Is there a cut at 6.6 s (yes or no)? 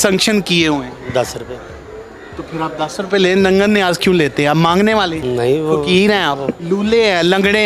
yes